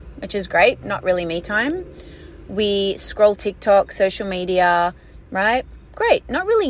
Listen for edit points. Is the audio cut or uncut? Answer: uncut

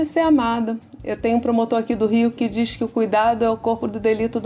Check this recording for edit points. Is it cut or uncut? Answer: uncut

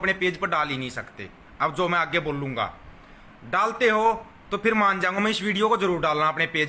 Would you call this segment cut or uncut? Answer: uncut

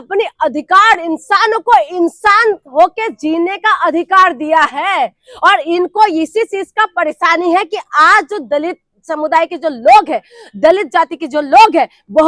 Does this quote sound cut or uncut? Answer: uncut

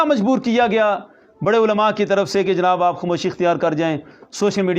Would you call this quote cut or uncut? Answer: uncut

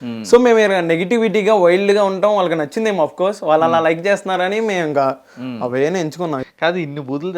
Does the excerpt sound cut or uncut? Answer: cut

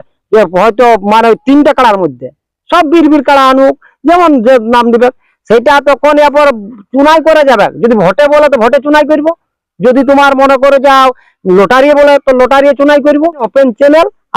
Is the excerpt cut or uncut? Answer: cut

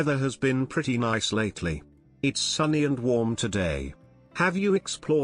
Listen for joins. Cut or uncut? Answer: uncut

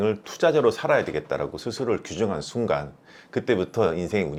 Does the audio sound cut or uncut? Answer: uncut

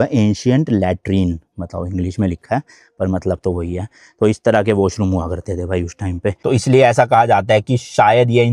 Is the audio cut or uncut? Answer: cut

